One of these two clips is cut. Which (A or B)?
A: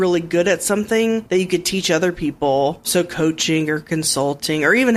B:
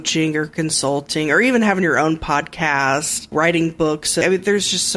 B